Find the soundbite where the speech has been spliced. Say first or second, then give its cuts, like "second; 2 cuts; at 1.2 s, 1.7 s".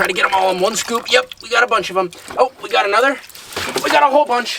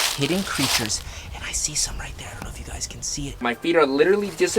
second; 1 cut; at 3.4 s